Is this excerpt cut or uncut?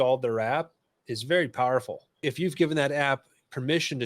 cut